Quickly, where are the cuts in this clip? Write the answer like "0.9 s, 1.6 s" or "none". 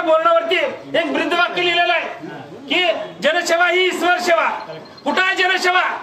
none